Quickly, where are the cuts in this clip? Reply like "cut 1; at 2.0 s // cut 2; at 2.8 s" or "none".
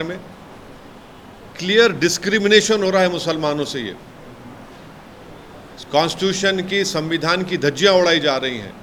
none